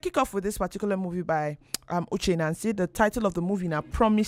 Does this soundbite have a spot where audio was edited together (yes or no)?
no